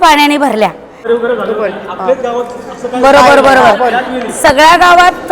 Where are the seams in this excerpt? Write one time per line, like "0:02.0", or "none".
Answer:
0:01.0